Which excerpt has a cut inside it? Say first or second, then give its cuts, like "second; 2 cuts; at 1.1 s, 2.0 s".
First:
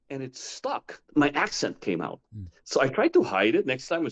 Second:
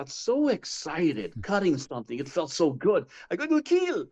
first; 1 cut; at 0.9 s